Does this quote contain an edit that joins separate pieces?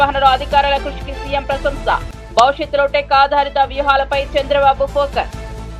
no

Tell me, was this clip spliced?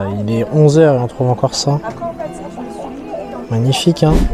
no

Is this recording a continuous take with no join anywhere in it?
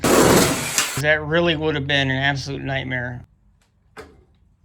yes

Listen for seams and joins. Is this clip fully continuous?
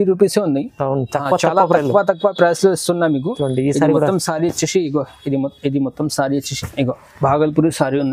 no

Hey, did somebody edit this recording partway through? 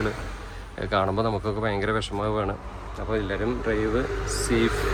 no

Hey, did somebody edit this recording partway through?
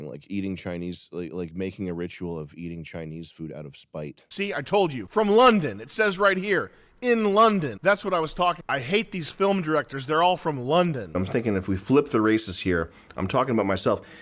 yes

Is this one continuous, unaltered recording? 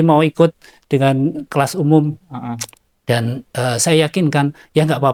yes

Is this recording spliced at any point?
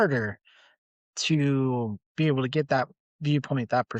yes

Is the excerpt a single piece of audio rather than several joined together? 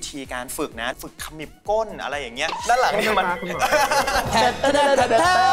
no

